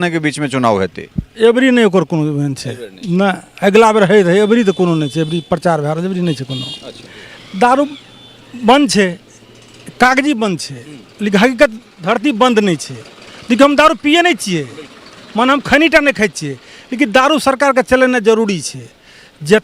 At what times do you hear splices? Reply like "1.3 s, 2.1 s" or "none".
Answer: 7.2 s